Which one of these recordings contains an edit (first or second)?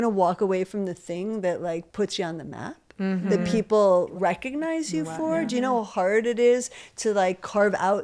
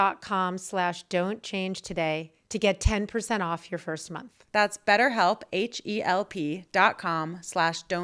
first